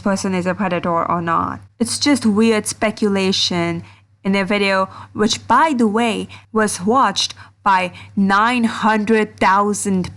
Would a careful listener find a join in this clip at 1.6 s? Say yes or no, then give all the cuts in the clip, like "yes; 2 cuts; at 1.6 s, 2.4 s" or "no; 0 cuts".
yes; 1 cut; at 1.6 s